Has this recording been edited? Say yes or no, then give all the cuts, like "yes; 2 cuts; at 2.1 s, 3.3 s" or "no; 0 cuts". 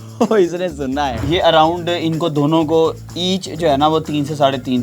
yes; 1 cut; at 1.2 s